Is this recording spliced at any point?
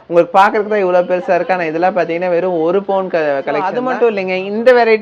yes; 1 cut; at 3.8 s

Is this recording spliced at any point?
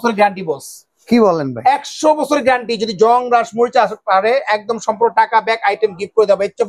no; 0 cuts

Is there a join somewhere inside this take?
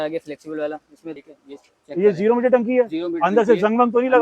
yes; 1 cut; at 1.2 s

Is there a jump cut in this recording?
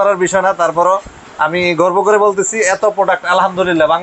no; 0 cuts

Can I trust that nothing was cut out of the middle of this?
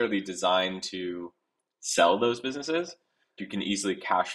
no; 1 cut; at 3.4 s

